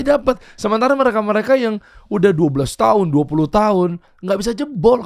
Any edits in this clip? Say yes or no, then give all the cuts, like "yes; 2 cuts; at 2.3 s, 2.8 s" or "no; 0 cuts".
no; 0 cuts